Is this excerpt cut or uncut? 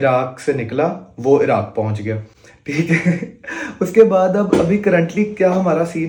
uncut